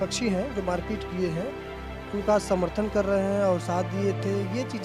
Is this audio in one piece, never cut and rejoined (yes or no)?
yes